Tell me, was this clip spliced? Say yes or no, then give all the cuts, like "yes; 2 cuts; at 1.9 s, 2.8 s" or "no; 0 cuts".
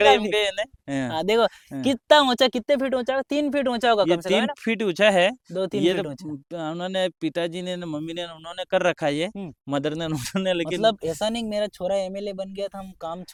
no; 0 cuts